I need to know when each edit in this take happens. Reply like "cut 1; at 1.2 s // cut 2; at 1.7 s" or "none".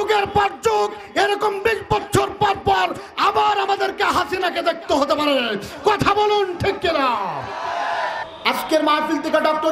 cut 1; at 8.3 s